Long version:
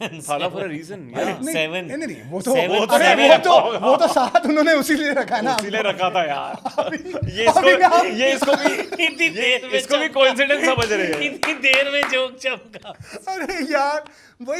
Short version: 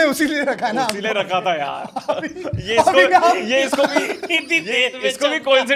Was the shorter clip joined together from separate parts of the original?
no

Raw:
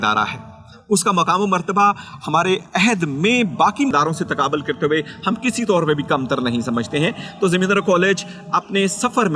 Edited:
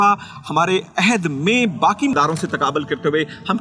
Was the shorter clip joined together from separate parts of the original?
no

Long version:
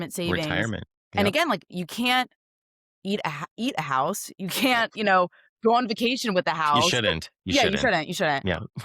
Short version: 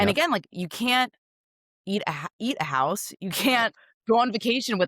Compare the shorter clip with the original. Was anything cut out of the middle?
yes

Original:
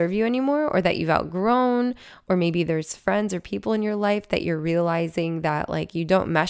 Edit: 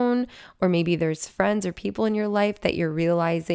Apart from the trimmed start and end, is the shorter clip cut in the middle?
no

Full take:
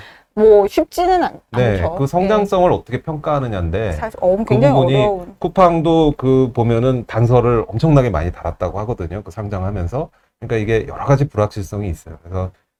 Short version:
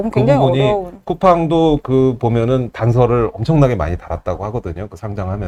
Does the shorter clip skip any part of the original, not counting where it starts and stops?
no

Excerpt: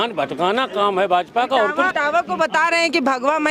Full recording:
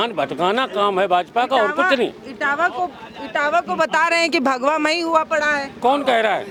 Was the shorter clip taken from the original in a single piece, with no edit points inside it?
no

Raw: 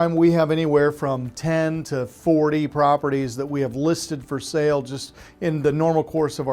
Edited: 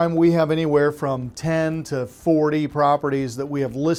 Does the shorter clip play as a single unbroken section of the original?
yes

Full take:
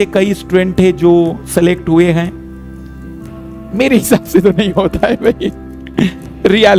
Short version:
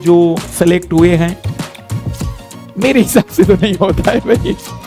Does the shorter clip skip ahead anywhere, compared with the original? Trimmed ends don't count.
no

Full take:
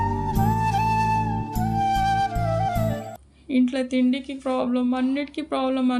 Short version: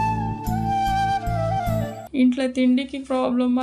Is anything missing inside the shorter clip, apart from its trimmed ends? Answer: yes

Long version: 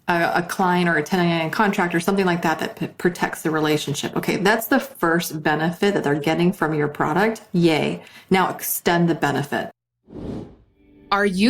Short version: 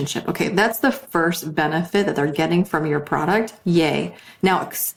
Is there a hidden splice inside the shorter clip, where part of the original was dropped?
no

